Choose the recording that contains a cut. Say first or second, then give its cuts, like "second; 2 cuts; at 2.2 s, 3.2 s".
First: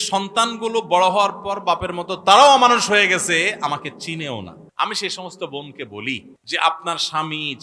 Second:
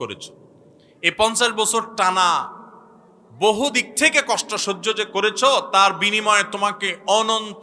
first; 2 cuts; at 4.6 s, 6.3 s